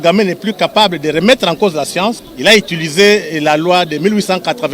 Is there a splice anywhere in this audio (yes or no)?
yes